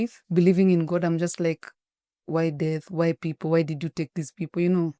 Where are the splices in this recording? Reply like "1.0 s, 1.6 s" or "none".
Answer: none